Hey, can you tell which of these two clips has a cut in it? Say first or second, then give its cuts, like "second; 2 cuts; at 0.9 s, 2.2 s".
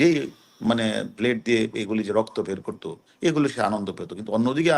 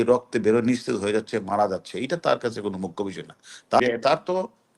second; 1 cut; at 3.8 s